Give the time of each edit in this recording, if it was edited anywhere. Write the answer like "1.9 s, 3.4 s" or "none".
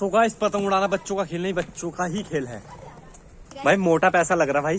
3.5 s